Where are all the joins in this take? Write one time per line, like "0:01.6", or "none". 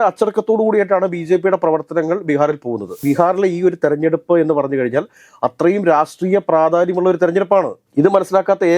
0:02.9

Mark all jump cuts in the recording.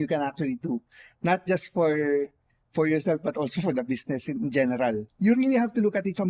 0:05.1

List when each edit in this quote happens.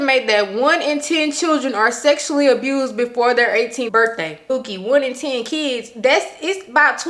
none

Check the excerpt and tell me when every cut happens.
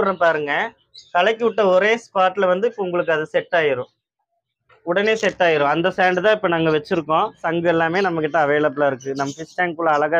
0:07.4

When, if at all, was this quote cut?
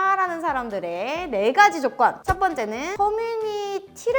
0:02.3

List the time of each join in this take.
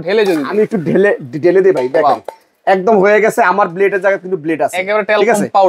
none

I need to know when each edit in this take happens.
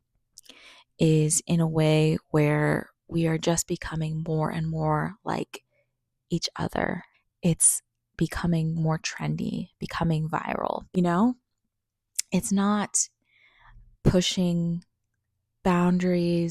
0:07.1
0:10.9

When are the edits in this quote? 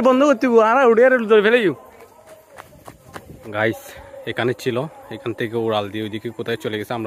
0:02.0
0:03.5

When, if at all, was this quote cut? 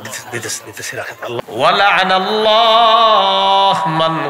0:01.4

